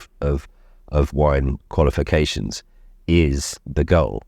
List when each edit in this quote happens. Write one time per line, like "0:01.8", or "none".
none